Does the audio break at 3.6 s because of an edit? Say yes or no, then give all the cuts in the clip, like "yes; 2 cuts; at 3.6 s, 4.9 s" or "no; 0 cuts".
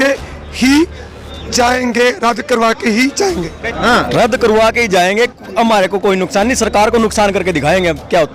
yes; 1 cut; at 3.6 s